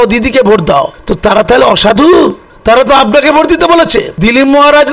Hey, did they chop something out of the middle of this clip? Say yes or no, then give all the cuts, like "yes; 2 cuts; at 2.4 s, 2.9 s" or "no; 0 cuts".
yes; 3 cuts; at 1.0 s, 2.5 s, 4.1 s